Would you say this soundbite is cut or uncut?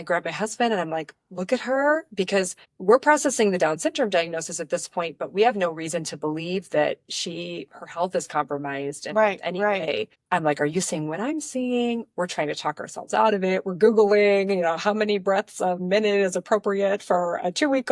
cut